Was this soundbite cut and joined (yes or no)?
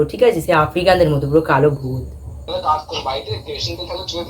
yes